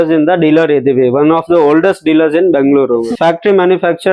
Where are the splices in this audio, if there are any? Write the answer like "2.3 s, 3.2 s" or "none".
3.1 s